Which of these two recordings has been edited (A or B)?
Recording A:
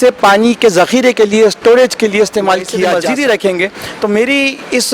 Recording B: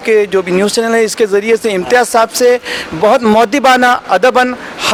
A